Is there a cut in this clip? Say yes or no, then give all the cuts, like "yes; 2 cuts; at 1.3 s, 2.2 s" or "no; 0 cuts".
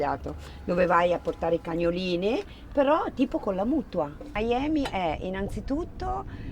yes; 1 cut; at 4.3 s